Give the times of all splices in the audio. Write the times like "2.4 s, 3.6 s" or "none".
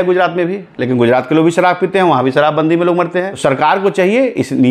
3.3 s